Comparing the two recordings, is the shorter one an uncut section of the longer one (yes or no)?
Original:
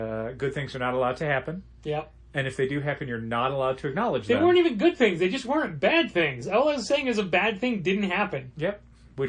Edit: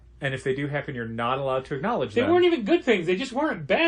yes